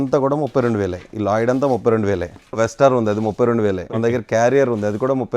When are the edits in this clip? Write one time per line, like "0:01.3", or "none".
0:02.6
0:03.9